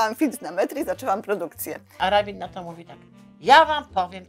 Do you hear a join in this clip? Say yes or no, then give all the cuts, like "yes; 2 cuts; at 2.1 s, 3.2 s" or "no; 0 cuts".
yes; 1 cut; at 1.9 s